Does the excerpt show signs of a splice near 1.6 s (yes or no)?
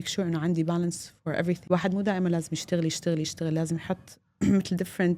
yes